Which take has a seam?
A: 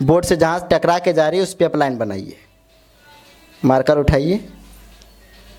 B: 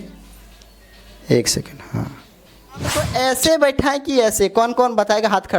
B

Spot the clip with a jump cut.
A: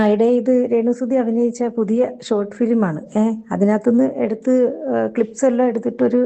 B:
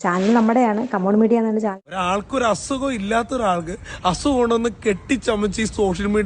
B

